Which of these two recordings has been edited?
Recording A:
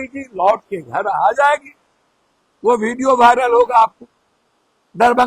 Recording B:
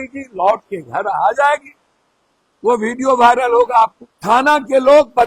B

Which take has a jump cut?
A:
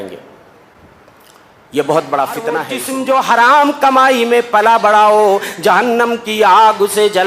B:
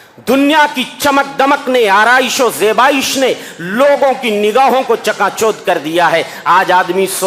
A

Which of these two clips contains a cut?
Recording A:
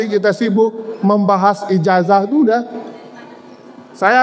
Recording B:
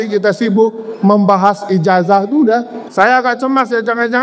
B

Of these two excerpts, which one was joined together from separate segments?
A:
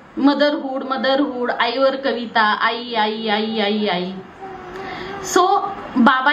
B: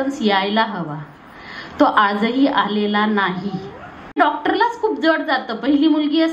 B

